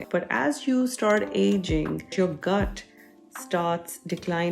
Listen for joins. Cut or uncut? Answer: cut